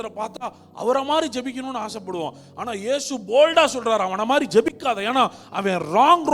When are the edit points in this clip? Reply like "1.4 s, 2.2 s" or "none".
none

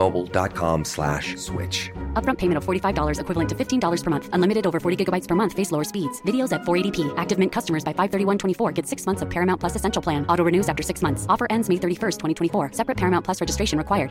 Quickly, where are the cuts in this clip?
none

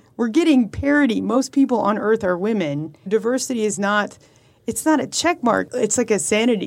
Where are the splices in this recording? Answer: 1.4 s, 3.1 s, 5.7 s

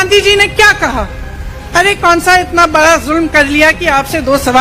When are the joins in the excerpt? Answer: none

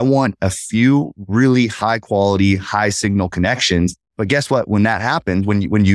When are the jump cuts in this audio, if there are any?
4.1 s

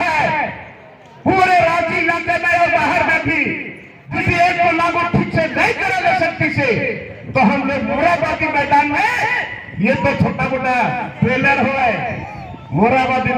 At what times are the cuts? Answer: 4.2 s

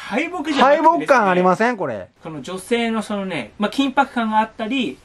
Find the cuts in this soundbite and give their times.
2.2 s

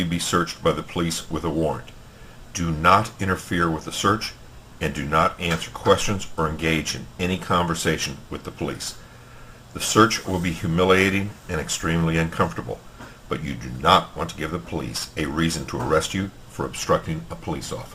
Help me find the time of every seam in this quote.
10.1 s

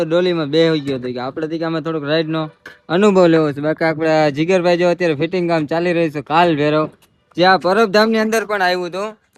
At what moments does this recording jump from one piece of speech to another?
none

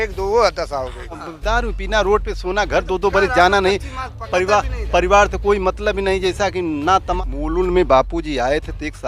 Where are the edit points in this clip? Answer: 1.3 s, 7.2 s

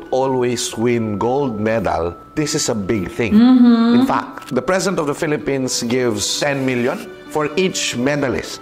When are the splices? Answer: none

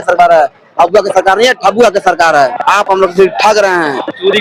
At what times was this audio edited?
none

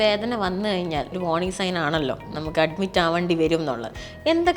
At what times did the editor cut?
1.2 s

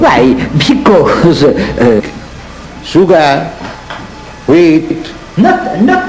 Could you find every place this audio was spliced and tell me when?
none

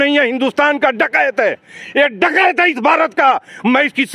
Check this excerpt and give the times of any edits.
none

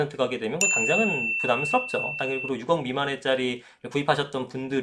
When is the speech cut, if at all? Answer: none

